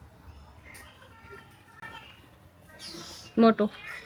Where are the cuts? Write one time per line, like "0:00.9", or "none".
none